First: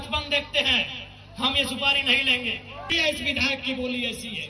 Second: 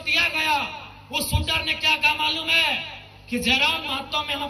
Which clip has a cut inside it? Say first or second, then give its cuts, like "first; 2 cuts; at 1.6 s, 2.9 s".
first; 1 cut; at 2.9 s